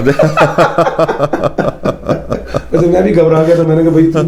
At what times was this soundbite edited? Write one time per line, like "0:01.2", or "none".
none